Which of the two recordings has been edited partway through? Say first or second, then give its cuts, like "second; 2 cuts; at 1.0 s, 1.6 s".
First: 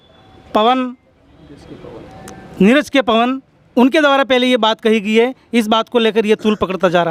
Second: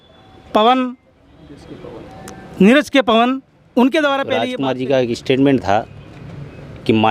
second; 1 cut; at 4.4 s